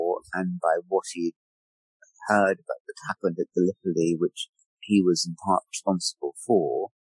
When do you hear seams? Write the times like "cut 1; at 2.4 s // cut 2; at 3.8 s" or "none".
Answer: none

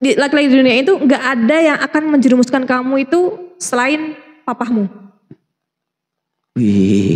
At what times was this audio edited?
cut 1; at 5.8 s

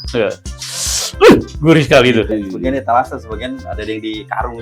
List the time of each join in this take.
cut 1; at 2.3 s

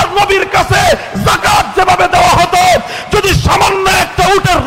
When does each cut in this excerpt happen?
none

